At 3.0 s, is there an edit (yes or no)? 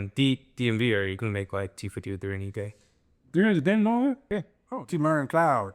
no